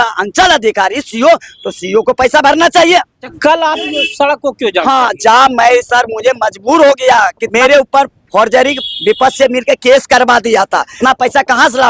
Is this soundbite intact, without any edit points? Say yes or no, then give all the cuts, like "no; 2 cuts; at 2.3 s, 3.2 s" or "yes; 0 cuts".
no; 3 cuts; at 3.2 s, 7.4 s, 10.9 s